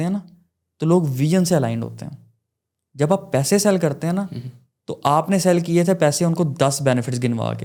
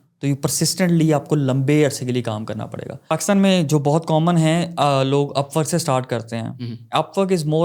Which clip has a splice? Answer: second; 1 cut; at 3.2 s

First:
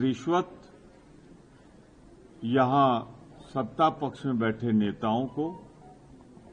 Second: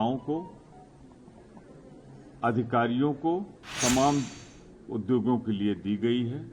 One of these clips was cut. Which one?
second; 1 cut; at 3.6 s

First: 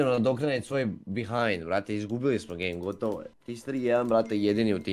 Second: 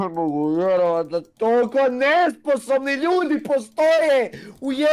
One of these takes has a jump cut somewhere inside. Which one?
first; 1 cut; at 3.3 s

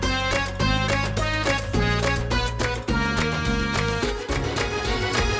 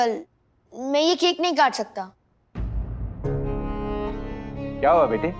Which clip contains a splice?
first; 1 cut; at 4.3 s

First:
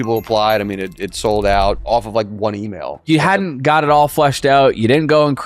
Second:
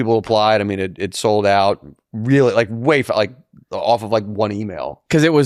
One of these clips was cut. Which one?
first; 2 cuts; at 1.8 s, 3.0 s

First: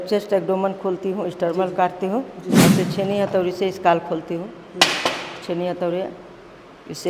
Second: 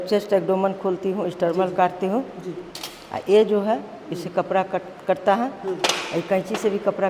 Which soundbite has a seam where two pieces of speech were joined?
first; 1 cut; at 2.5 s

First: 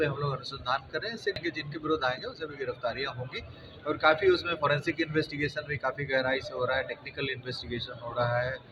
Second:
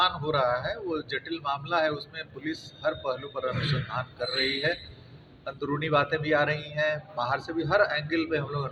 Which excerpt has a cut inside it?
first; 1 cut; at 1.4 s

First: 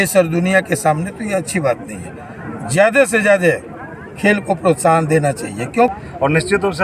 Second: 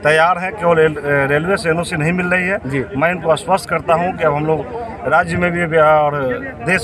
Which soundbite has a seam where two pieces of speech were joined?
first; 1 cut; at 5.9 s

